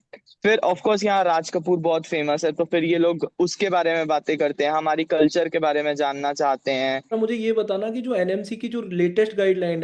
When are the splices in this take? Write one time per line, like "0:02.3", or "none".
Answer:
0:07.1